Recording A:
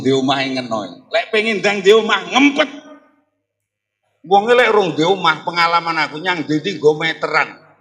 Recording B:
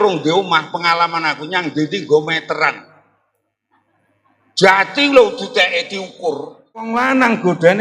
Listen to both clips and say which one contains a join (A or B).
B